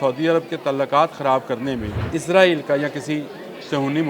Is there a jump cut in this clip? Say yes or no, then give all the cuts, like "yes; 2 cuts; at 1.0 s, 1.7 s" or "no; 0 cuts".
yes; 1 cut; at 1.9 s